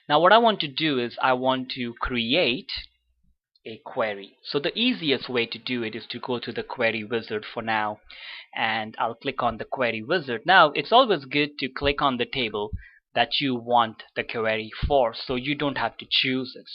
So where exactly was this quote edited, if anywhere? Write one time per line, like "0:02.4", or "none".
0:06.1